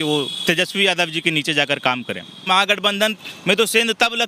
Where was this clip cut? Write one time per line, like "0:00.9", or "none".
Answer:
0:02.4